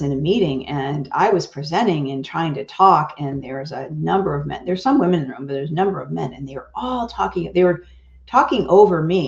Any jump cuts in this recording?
no; 0 cuts

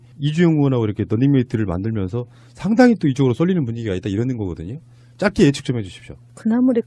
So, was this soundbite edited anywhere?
yes; 1 cut; at 5.9 s

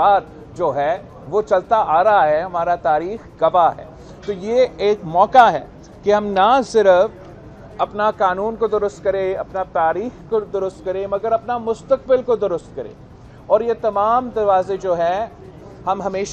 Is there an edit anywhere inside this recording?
no; 0 cuts

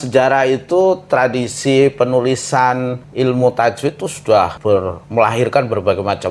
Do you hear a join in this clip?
yes; 2 cuts; at 3.0 s, 4.7 s

